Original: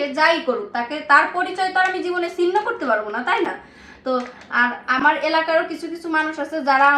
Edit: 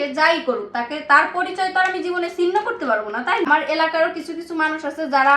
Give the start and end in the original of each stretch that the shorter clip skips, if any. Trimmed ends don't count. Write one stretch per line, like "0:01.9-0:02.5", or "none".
0:03.5-0:05.0

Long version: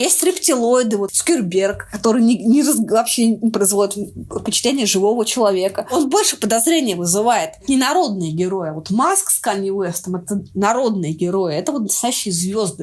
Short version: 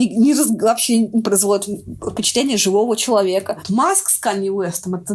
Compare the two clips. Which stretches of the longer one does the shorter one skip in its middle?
0:05.8-0:08.8

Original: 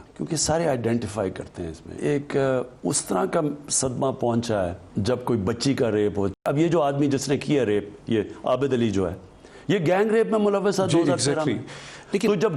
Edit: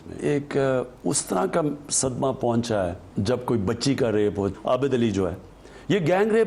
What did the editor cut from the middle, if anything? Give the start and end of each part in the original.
0:06.4-0:08.4

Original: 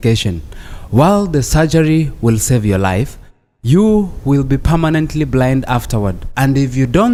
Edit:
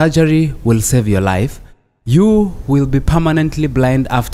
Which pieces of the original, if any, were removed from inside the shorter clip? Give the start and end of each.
none

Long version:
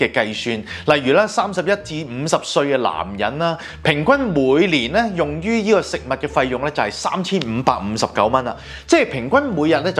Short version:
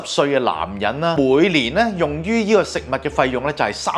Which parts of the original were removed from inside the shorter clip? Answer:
0:03.5-0:04.3

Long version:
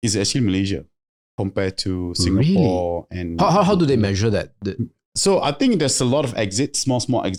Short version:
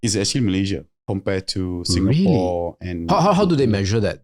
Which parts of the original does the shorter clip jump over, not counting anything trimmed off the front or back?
0:00.9-0:01.2

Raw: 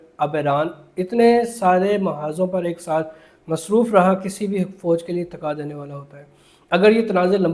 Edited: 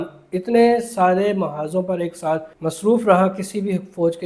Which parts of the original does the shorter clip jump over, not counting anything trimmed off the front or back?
0:03.2-0:03.4

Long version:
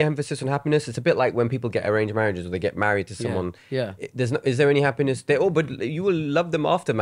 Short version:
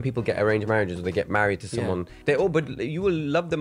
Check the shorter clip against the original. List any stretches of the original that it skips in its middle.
0:03.7-0:05.2

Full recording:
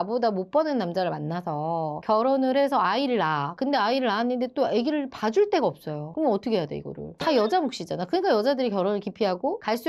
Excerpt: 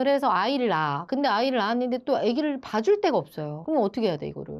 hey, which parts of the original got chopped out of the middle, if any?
none

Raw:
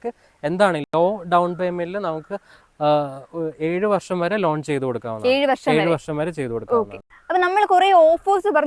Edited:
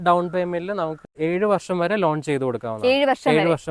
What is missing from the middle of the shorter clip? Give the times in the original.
0:02.4-0:03.5

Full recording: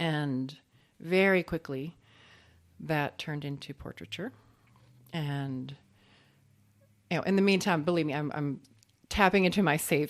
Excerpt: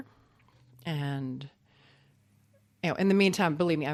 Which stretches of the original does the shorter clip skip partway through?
none

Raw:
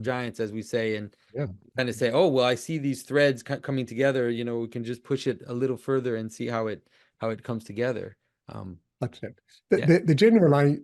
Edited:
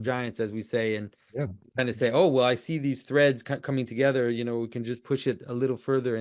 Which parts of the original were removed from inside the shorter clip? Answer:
none

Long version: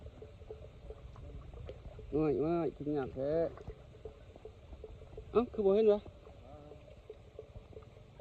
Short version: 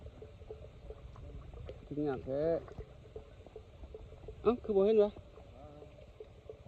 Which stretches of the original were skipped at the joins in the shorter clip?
0:01.9-0:02.8

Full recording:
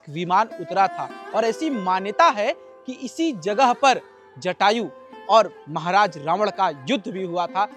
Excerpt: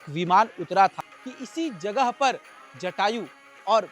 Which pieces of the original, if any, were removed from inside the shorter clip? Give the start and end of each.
0:01.1-0:02.7

